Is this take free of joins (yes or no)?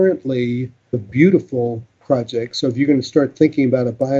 no